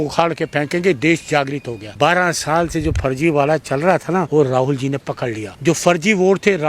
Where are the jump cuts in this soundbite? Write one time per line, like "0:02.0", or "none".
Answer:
0:01.8
0:04.3
0:05.5